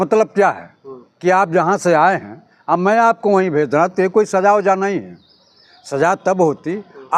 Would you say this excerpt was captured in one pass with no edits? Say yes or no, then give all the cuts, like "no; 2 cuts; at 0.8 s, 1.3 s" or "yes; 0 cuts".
yes; 0 cuts